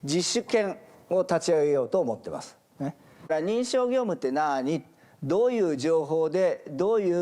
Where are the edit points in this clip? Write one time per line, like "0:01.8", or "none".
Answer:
0:03.1